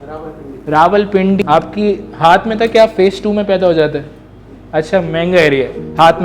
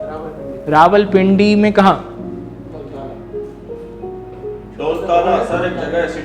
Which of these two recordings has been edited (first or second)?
first